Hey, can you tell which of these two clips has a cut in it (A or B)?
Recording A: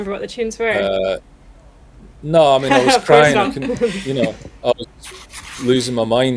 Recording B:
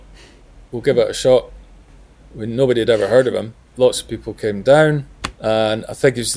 B